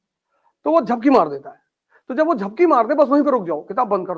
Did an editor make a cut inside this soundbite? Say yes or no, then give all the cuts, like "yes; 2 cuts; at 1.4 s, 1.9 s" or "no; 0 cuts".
no; 0 cuts